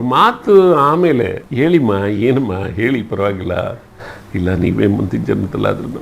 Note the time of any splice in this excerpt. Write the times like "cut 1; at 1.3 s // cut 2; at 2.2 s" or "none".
cut 1; at 1.4 s